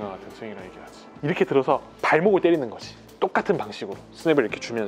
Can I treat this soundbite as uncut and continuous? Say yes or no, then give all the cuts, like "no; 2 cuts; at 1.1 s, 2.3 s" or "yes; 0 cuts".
no; 1 cut; at 1.2 s